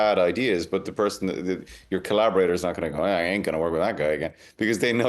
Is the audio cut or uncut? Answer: uncut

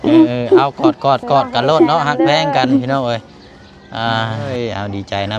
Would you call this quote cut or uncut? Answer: cut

